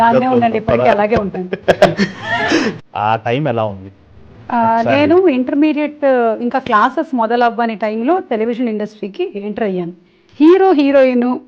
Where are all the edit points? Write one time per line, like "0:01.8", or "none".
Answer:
0:02.8
0:10.0

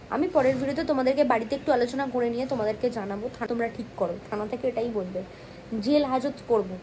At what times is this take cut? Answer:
0:03.5

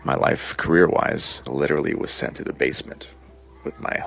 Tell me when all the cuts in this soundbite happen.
0:01.3

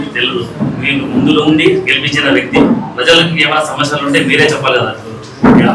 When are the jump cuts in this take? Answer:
none

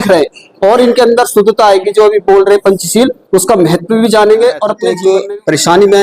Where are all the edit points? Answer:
0:04.9

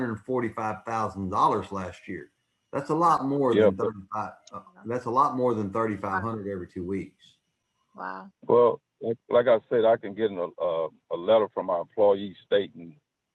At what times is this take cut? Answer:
none

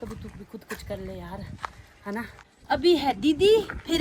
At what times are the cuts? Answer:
0:02.4

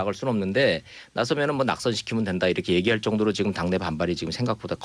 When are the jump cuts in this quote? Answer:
0:00.9

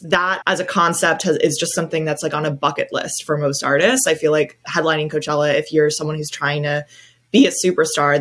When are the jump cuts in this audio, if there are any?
0:04.7

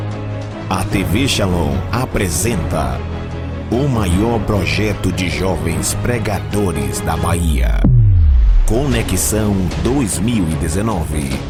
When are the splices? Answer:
none

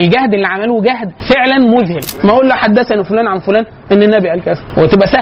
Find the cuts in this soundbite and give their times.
0:02.1

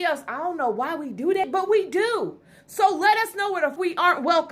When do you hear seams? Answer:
0:01.5
0:03.8

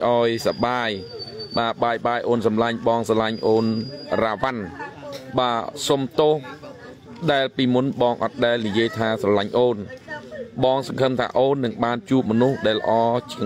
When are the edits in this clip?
none

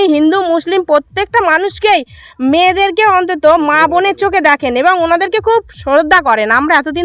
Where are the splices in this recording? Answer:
none

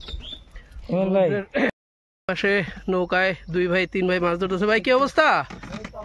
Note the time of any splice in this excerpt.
0:01.8

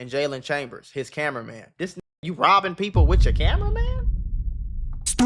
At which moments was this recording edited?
none

